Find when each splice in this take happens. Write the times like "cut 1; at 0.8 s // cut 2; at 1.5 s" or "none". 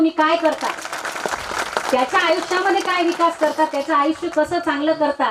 none